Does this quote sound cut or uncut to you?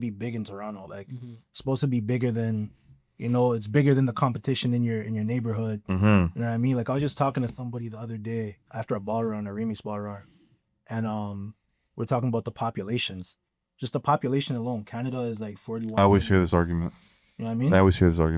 uncut